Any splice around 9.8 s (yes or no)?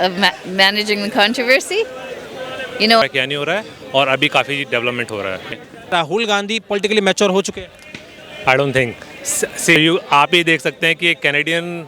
yes